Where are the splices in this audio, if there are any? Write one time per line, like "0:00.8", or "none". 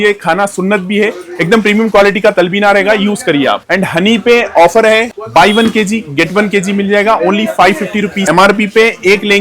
0:03.6
0:08.2